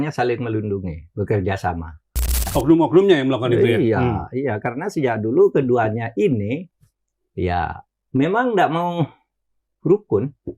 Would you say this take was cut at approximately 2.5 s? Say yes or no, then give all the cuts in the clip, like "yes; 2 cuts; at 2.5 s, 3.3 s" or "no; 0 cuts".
yes; 1 cut; at 2.5 s